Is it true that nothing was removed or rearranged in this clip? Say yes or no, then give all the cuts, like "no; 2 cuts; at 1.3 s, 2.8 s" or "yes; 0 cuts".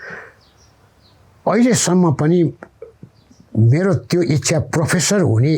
yes; 0 cuts